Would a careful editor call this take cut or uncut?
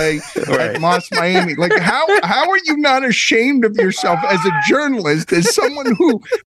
uncut